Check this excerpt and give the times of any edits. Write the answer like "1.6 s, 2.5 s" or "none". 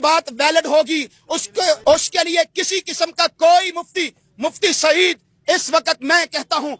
1.8 s